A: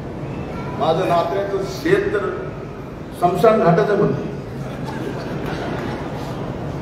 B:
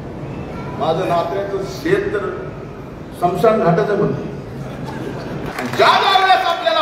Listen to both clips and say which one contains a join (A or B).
B